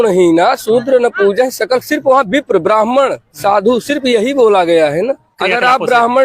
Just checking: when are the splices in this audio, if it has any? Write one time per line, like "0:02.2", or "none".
0:05.3